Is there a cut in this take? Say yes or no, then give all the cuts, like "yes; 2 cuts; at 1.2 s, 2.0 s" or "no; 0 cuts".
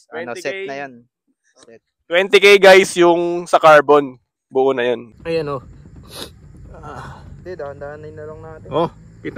yes; 1 cut; at 5.1 s